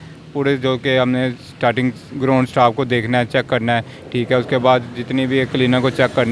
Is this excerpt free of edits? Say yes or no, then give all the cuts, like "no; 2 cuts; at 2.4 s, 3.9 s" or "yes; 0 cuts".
yes; 0 cuts